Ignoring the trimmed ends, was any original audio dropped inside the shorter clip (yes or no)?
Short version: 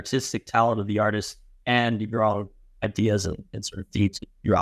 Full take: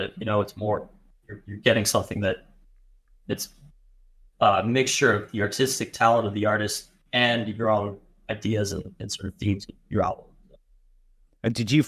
no